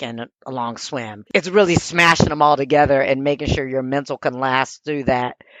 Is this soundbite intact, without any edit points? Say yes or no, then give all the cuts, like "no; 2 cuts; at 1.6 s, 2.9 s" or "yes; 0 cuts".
yes; 0 cuts